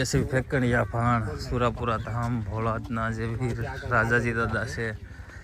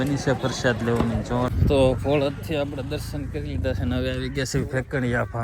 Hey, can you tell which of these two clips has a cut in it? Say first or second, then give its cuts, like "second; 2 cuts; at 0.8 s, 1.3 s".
second; 1 cut; at 1.6 s